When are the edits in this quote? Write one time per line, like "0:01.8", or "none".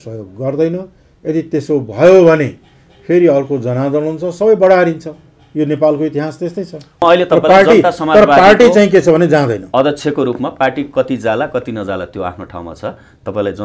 0:07.0